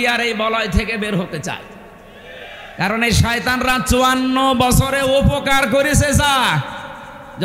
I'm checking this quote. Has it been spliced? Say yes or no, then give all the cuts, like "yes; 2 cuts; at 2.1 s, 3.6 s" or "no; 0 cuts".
no; 0 cuts